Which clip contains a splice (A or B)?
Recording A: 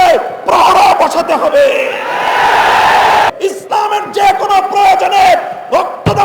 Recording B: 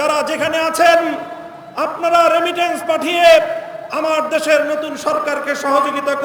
A